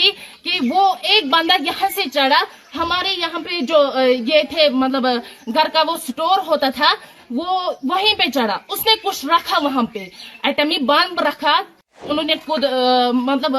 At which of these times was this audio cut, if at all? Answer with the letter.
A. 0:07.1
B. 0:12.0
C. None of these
B